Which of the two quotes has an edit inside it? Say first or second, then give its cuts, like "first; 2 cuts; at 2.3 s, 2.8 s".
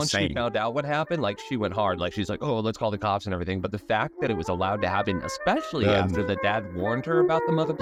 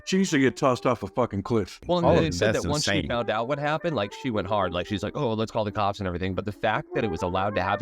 second; 1 cut; at 1.7 s